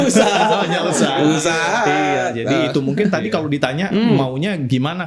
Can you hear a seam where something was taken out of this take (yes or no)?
no